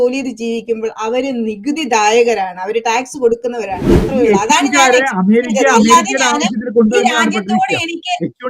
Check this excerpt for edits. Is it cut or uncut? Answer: cut